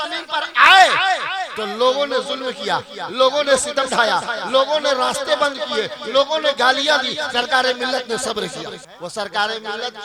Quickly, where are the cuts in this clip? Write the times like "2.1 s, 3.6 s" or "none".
8.9 s